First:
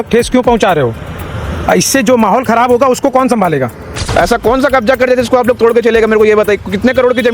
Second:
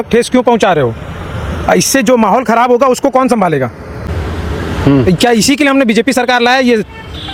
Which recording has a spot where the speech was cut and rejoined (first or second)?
first